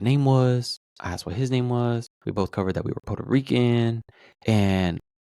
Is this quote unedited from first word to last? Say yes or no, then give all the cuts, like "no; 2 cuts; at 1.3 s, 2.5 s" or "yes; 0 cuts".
no; 1 cut; at 2.1 s